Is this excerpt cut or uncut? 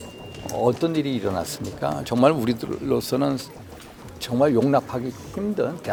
uncut